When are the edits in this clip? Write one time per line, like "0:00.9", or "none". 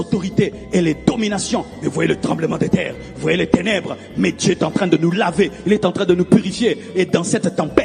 none